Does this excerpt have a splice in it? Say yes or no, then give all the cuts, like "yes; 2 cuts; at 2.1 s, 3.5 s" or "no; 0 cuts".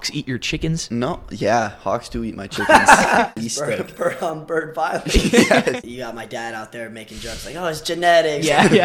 yes; 2 cuts; at 3.3 s, 5.8 s